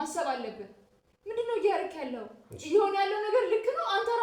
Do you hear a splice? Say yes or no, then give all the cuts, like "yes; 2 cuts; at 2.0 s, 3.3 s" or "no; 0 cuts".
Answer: no; 0 cuts